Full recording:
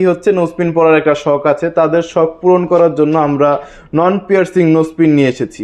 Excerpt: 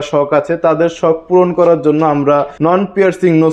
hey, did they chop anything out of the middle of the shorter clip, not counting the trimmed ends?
yes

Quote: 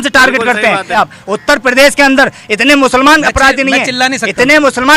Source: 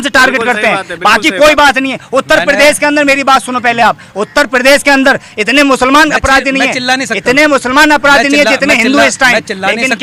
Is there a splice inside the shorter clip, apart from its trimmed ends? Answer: yes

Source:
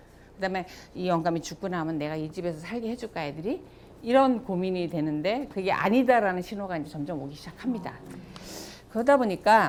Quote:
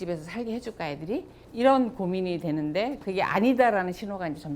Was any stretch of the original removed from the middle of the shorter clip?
yes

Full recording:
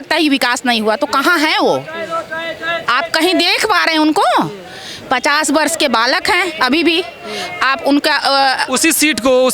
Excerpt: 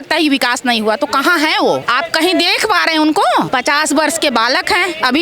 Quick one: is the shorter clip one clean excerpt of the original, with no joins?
no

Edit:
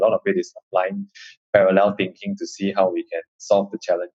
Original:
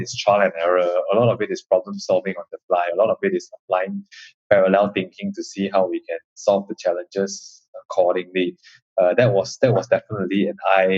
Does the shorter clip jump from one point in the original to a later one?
no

